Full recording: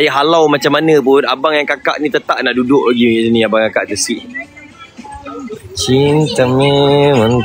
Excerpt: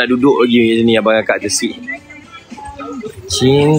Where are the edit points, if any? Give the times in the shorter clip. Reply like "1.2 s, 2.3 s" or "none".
none

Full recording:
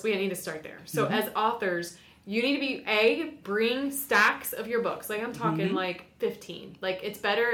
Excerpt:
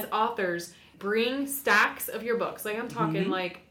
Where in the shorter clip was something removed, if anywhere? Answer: 0.9 s

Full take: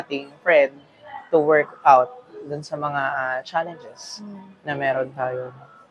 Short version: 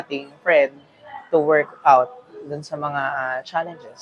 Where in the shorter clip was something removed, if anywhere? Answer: none

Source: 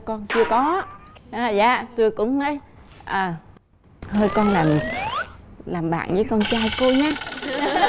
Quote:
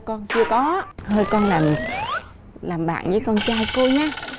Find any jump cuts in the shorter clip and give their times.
0.9 s

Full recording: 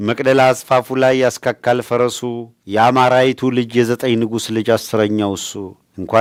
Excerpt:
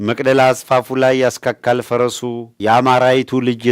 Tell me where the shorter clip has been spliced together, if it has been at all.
2.5 s

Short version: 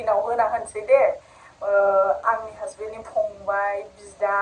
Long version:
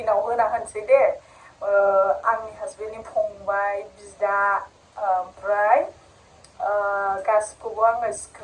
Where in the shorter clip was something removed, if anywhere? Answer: none

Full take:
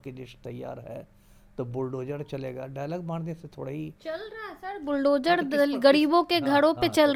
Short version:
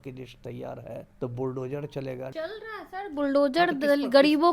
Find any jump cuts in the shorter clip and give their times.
1.1 s, 2.3 s

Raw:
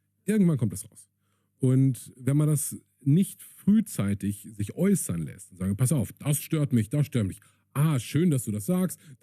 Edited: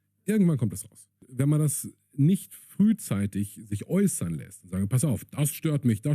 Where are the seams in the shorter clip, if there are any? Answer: 1.2 s

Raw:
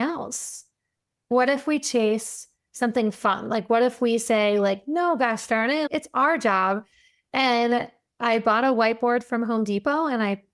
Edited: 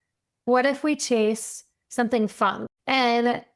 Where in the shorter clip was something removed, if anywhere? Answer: 2.6 s

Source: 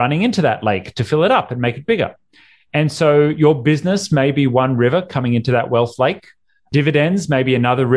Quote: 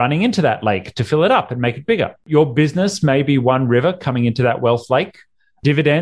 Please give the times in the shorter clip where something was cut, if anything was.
2.3 s

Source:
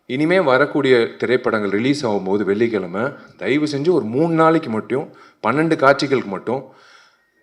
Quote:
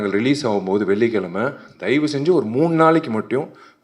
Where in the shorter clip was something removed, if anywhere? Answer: none

